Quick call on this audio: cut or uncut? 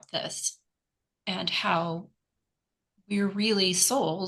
uncut